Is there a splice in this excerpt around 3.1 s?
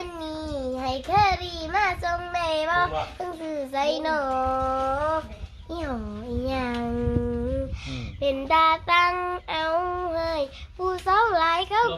no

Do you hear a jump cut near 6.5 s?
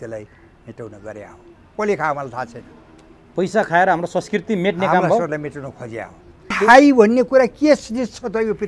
yes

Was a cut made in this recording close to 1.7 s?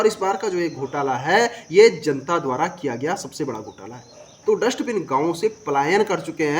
no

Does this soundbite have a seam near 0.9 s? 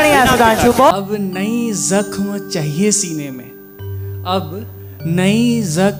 yes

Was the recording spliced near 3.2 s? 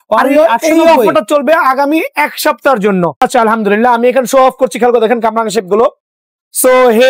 yes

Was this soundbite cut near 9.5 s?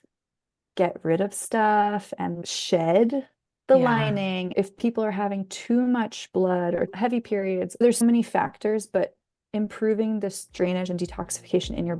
no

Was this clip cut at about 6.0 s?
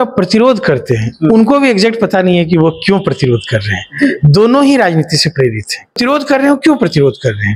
yes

